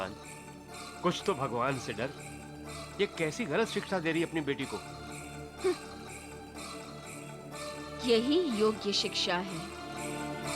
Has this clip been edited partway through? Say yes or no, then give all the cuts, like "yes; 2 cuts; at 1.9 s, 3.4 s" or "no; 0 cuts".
no; 0 cuts